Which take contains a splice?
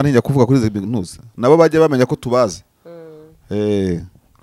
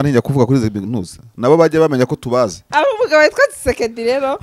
second; 1 cut; at 2.6 s

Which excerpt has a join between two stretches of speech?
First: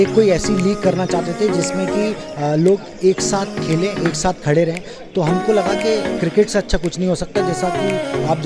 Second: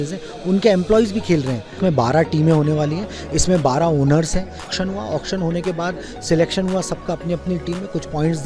second; 2 cuts; at 1.8 s, 4.7 s

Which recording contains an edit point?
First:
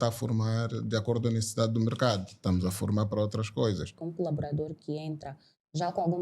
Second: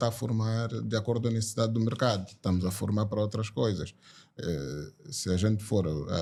first; 1 cut; at 3.9 s

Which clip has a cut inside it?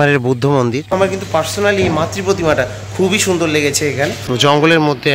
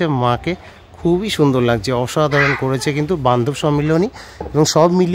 first; 2 cuts; at 0.9 s, 4.2 s

